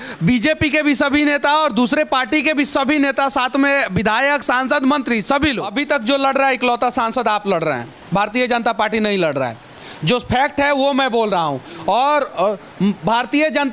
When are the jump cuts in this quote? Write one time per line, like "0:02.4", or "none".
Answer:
0:05.7